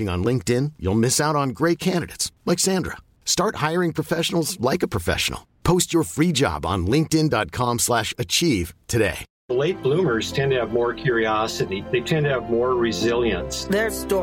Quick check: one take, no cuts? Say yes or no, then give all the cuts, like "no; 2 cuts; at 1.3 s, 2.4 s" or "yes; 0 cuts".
no; 1 cut; at 9.3 s